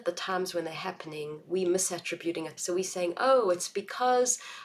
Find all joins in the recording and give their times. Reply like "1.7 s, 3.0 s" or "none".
2.6 s